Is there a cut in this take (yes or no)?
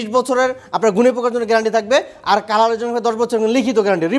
no